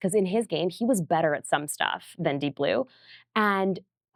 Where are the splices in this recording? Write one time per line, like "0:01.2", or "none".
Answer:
none